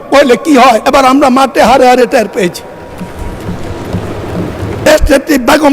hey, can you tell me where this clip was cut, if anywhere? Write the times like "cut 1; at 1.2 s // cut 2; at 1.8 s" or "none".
cut 1; at 0.8 s // cut 2; at 4.8 s